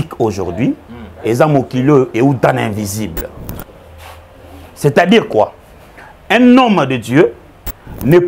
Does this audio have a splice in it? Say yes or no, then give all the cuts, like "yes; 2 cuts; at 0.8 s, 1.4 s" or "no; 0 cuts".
yes; 1 cut; at 3.5 s